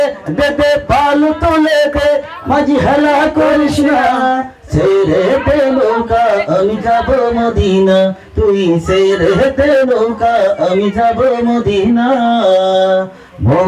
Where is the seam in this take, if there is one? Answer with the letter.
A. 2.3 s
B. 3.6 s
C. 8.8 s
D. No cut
A